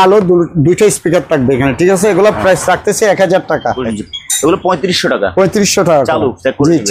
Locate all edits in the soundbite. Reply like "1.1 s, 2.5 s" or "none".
3.8 s